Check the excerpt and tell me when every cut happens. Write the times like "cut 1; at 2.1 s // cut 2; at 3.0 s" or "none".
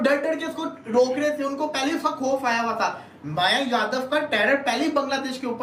none